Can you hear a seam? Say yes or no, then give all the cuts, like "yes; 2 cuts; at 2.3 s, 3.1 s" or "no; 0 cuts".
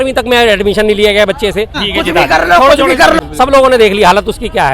yes; 2 cuts; at 1.8 s, 3.2 s